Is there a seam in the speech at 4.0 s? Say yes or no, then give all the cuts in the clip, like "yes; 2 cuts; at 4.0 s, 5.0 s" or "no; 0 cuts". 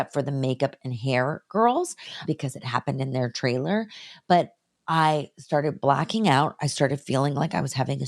no; 1 cut; at 2.2 s